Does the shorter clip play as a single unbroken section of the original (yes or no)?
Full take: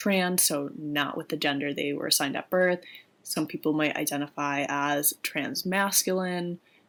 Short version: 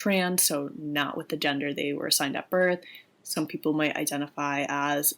yes